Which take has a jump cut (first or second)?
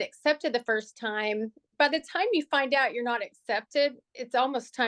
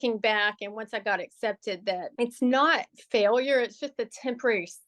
second